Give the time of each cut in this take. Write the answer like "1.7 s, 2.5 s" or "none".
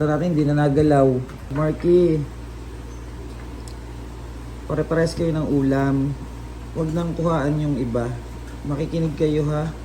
1.5 s